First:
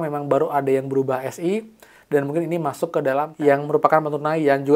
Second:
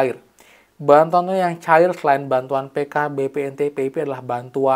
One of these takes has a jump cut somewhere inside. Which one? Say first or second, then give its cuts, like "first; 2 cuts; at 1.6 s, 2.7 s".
first; 1 cut; at 3.3 s